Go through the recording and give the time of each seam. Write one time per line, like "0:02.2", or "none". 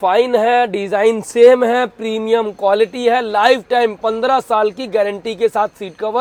none